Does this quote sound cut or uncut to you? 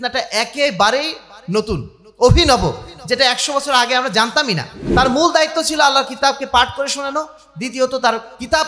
cut